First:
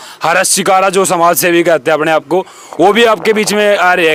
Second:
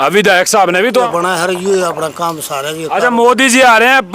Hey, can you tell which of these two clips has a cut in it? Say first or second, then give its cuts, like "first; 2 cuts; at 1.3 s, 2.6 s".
second; 1 cut; at 1.1 s